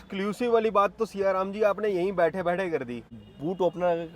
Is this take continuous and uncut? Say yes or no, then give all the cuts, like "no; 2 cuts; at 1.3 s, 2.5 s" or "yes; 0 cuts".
no; 1 cut; at 3.2 s